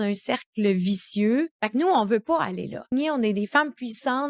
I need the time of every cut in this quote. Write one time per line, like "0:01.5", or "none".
0:01.5
0:02.9